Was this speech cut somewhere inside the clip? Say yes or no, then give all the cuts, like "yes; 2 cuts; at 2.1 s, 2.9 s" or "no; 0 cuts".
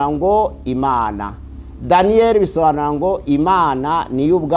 no; 0 cuts